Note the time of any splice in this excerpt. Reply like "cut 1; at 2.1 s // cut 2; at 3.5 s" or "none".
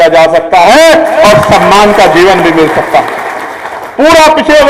none